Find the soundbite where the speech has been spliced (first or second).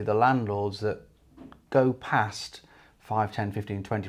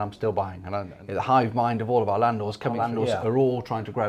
second